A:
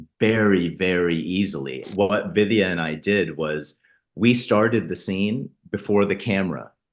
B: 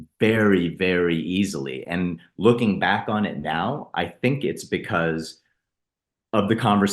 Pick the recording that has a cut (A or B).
A